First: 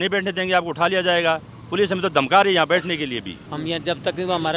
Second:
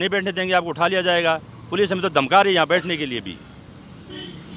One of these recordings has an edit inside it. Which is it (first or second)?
first